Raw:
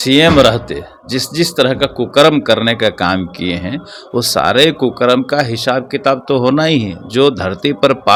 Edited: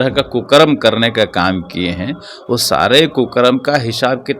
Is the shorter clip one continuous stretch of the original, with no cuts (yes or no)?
yes